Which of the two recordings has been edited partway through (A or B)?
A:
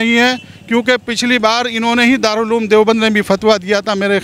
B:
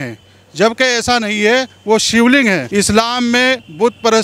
B